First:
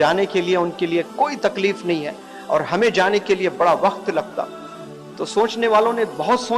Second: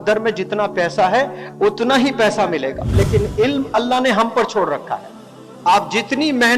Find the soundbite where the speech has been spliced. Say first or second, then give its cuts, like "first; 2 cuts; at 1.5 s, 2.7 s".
second; 1 cut; at 2.9 s